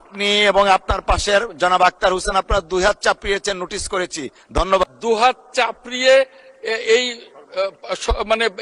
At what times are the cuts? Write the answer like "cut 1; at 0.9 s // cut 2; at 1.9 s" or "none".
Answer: cut 1; at 4.8 s